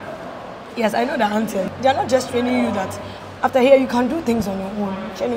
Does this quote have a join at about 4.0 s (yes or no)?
no